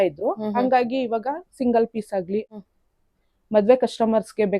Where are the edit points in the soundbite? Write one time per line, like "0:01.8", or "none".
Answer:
0:02.5